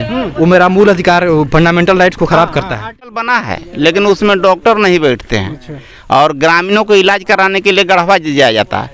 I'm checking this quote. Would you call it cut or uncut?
cut